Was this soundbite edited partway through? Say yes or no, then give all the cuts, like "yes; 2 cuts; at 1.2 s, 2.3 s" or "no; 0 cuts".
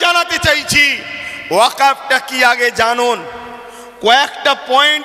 no; 0 cuts